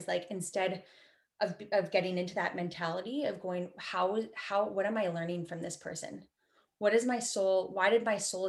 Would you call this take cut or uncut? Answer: uncut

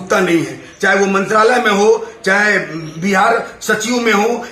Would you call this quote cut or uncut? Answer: uncut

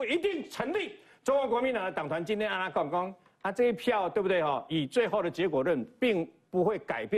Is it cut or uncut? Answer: uncut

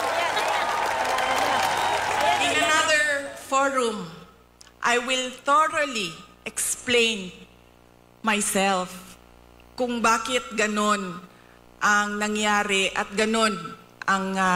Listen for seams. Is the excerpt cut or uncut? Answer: uncut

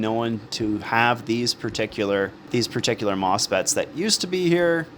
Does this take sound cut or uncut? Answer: cut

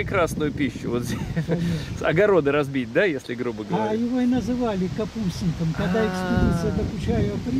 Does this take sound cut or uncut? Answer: uncut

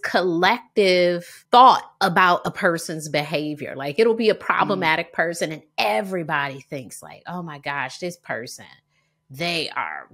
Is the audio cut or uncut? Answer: cut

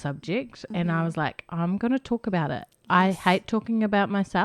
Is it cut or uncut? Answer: uncut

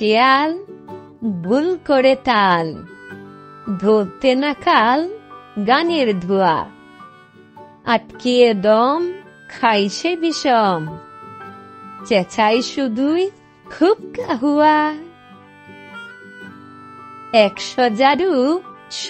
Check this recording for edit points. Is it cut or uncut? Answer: cut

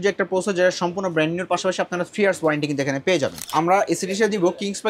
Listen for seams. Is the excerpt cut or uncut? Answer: cut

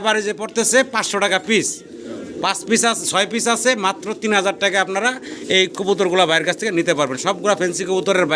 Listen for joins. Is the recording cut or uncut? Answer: uncut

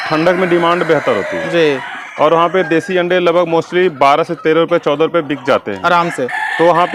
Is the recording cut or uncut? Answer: uncut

